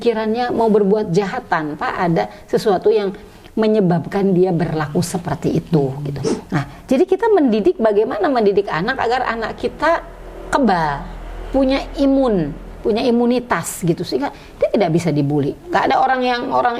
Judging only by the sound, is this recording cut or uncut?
cut